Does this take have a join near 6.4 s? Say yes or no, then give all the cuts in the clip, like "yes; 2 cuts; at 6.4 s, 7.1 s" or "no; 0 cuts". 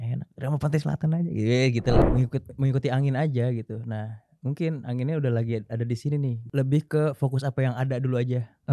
yes; 2 cuts; at 2.0 s, 6.4 s